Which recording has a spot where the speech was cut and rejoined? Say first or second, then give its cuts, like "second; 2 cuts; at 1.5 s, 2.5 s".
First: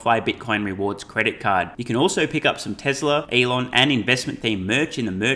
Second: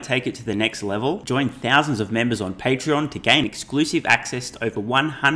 first; 1 cut; at 3.3 s